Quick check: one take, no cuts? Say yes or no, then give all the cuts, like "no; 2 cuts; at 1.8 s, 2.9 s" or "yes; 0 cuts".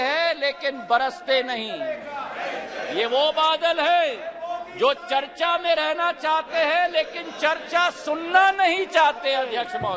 yes; 0 cuts